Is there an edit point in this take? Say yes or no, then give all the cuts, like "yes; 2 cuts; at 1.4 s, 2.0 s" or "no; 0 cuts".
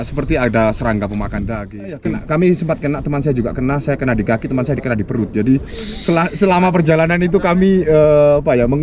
yes; 1 cut; at 2.0 s